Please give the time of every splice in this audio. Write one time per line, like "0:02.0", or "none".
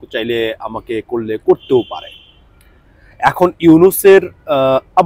none

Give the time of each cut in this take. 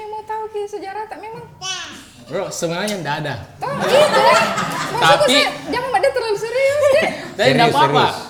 none

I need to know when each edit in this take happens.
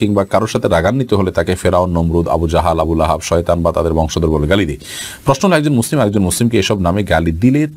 none

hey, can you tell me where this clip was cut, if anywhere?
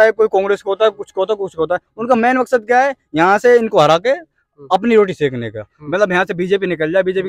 none

